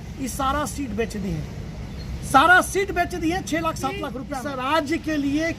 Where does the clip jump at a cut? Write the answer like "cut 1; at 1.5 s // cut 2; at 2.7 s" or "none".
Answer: cut 1; at 4.2 s